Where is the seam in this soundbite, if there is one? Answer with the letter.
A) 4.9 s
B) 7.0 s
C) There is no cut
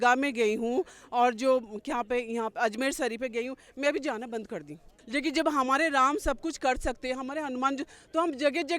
A